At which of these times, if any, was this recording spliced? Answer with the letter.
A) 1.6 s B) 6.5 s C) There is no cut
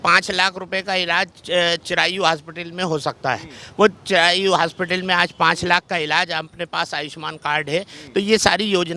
C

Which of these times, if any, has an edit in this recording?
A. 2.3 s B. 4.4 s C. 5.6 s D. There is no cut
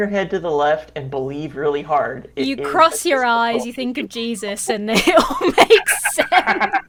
D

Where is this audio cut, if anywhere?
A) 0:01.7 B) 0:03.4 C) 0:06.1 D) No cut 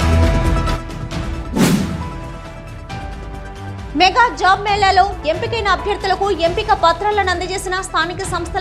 A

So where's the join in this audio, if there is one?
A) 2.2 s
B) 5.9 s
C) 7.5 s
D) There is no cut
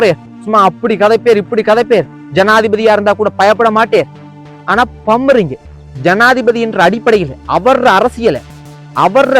B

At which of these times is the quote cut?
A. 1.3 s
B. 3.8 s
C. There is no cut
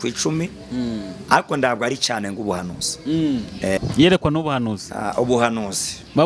B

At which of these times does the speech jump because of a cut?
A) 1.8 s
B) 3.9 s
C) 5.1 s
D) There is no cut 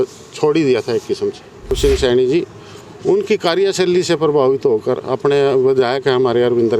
A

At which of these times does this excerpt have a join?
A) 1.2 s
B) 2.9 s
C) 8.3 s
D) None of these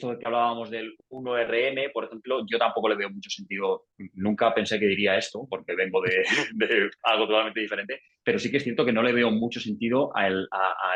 D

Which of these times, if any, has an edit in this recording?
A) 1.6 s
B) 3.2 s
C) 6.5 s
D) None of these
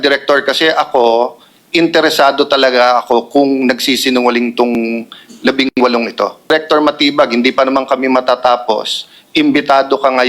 C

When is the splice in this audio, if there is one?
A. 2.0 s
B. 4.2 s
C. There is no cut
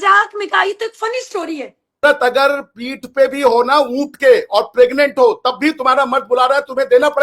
A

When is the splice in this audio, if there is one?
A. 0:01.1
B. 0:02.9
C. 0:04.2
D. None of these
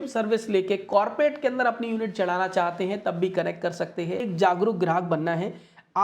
C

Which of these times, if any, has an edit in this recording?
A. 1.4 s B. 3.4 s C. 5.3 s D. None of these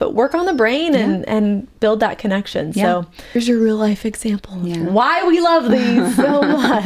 B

